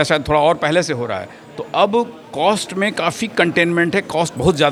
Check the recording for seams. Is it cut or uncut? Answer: uncut